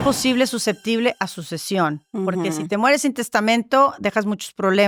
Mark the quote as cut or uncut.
uncut